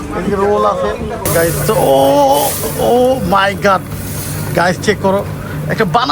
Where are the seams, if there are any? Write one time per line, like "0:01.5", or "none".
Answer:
0:01.3
0:02.9